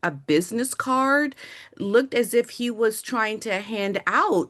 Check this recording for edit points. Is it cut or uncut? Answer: uncut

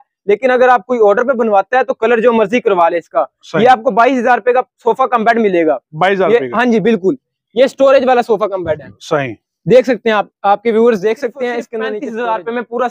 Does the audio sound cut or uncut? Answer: cut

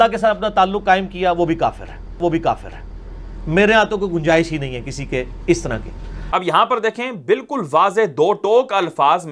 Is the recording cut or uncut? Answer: uncut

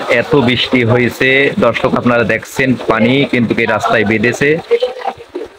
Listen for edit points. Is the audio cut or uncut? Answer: uncut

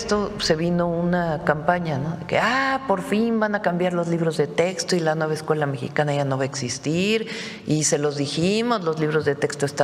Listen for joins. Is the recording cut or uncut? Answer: uncut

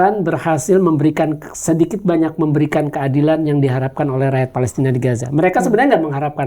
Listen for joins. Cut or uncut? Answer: uncut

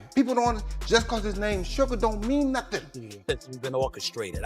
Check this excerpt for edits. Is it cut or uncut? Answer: cut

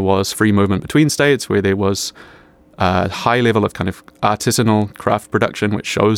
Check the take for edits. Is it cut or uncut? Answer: uncut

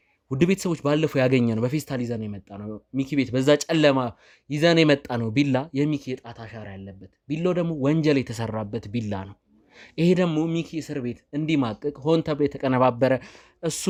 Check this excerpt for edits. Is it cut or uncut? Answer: uncut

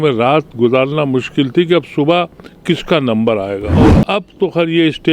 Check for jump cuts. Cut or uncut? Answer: cut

